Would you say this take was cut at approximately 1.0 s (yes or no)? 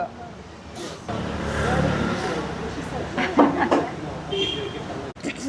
no